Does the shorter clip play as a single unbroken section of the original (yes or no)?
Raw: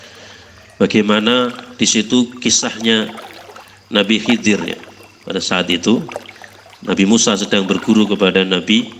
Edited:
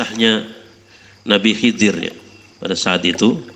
yes